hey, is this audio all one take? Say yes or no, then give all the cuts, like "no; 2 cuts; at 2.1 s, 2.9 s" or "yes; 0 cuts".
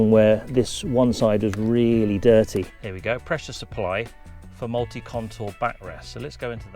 no; 1 cut; at 2.8 s